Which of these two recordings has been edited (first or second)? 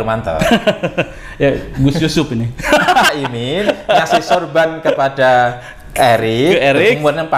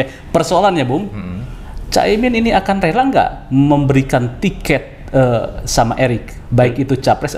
first